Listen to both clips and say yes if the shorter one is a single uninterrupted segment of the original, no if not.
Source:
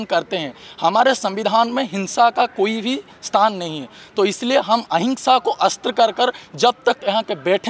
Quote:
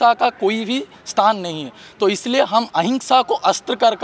yes